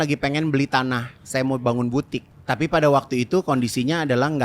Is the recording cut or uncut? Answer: cut